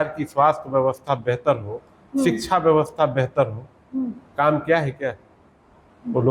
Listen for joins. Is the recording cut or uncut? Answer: uncut